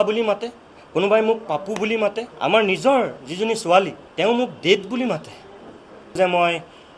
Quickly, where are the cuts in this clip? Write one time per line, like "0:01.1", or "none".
0:02.3
0:04.0
0:06.2